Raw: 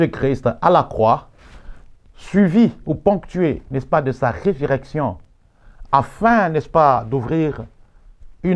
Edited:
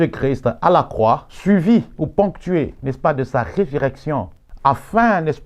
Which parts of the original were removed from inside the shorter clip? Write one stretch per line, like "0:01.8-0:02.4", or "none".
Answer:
0:01.3-0:02.2
0:05.3-0:05.7